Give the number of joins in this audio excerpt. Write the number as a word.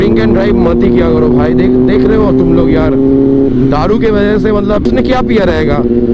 zero